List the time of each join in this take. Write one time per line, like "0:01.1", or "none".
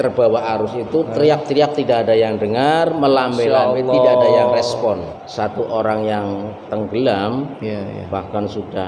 0:05.1